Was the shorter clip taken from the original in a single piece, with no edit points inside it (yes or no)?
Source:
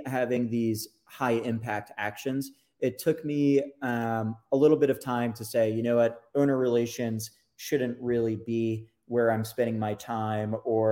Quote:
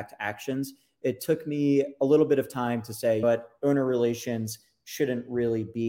no